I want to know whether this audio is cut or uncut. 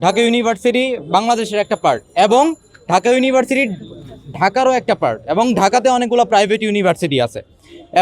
uncut